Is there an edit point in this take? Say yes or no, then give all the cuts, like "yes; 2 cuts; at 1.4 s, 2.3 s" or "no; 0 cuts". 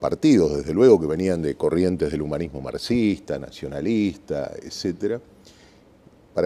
no; 0 cuts